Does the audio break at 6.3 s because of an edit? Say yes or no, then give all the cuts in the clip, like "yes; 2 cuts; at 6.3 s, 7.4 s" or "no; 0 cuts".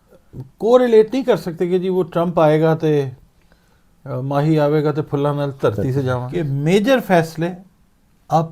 yes; 1 cut; at 6.3 s